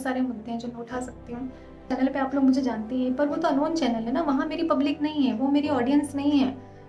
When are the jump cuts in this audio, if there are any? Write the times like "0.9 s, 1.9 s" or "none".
1.9 s